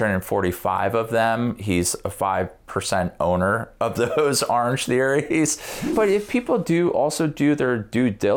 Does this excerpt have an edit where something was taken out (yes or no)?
yes